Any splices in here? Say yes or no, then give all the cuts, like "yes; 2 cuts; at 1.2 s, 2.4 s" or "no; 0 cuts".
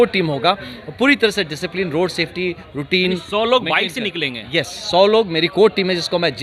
no; 0 cuts